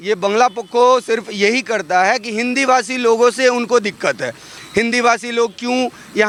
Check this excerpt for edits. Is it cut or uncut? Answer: uncut